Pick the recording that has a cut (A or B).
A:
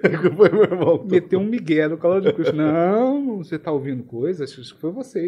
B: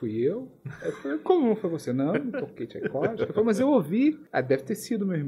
B